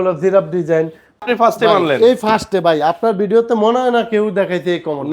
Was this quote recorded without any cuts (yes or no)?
no